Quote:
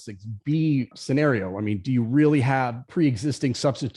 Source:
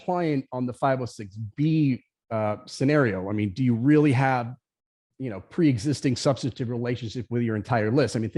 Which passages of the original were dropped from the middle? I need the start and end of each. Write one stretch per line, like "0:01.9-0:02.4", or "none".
0:02.1-0:02.7
0:04.5-0:05.4